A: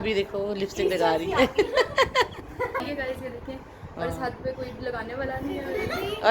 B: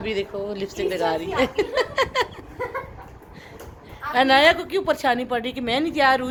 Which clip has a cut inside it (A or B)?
A